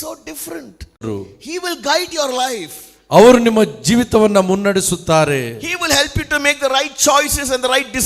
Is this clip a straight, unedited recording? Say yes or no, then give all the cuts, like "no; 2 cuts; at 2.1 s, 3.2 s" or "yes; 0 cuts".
no; 1 cut; at 1.0 s